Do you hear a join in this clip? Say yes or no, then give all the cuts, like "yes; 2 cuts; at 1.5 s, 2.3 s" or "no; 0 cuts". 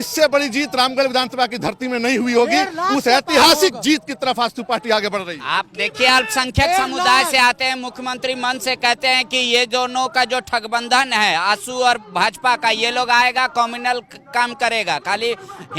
no; 0 cuts